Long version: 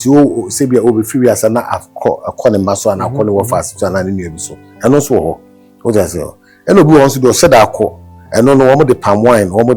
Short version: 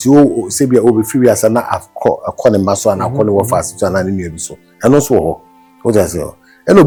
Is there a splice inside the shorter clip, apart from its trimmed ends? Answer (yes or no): no